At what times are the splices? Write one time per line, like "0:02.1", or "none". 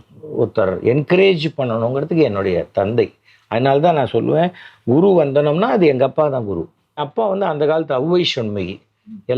0:07.0